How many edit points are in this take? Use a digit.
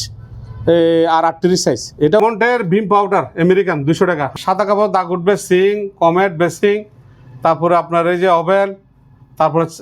2